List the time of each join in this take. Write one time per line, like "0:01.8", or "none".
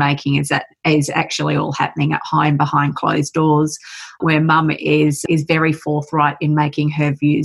none